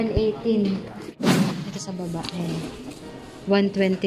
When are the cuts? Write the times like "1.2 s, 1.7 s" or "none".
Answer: 1.2 s